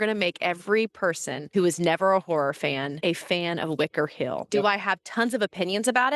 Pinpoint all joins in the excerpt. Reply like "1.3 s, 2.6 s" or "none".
1.3 s, 2.9 s, 4.5 s